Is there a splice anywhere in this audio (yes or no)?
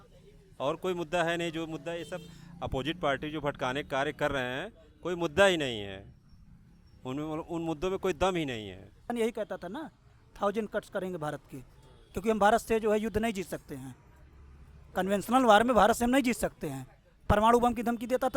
yes